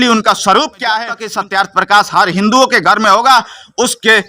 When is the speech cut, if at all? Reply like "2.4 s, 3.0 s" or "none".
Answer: 1.2 s